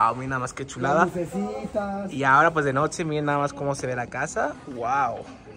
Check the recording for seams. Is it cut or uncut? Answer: uncut